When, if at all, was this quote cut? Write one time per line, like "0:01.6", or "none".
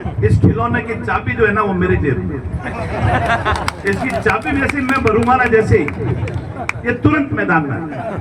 none

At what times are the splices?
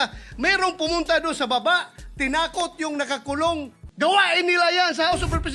0:03.8

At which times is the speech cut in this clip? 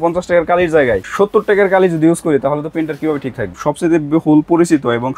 0:01.0
0:03.6

